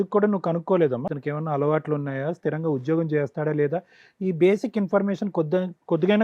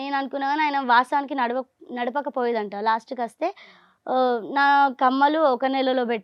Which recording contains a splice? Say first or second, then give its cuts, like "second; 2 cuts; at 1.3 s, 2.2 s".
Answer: first; 1 cut; at 1.1 s